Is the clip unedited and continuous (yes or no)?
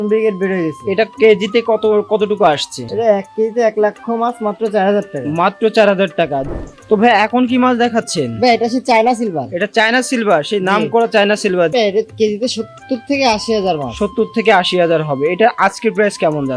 no